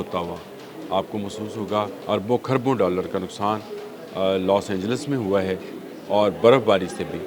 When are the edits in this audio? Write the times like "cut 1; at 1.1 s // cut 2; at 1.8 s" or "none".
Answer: cut 1; at 2.0 s